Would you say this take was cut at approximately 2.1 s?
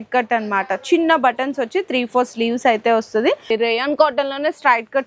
no; 1 cut; at 3.4 s

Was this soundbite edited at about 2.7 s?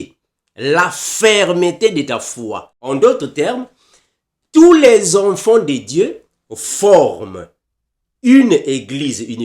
yes; 1 cut; at 2.7 s

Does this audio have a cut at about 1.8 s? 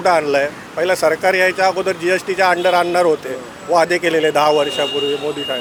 no; 0 cuts

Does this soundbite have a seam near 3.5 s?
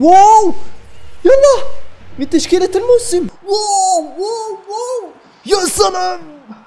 yes; 1 cut; at 3.5 s

